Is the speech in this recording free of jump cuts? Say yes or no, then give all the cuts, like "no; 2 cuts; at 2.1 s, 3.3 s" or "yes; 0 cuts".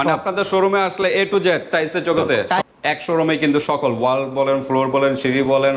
no; 1 cut; at 2.7 s